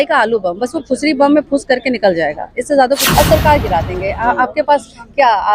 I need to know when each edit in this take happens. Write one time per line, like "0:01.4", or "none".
0:03.1